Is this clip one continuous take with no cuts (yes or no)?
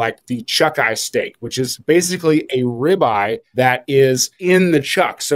no